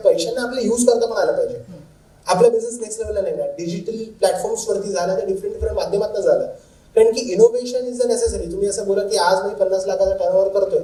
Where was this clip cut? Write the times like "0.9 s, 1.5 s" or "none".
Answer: none